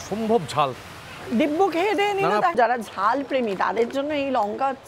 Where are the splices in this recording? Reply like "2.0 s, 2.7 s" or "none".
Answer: 2.5 s